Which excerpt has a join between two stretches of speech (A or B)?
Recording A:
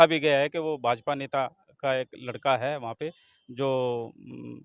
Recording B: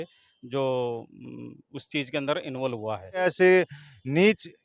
B